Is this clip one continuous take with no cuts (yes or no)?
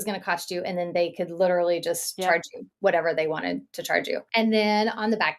no